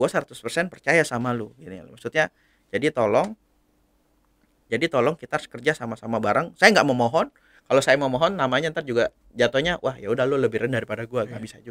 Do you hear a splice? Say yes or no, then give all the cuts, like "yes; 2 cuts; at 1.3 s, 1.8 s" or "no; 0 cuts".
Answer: no; 0 cuts